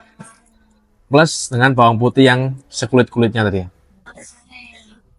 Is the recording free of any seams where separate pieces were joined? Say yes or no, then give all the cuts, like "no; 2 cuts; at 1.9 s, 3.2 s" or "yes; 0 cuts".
yes; 0 cuts